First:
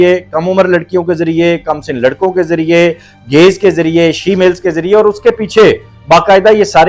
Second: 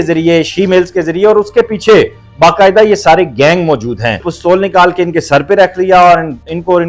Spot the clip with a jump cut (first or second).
second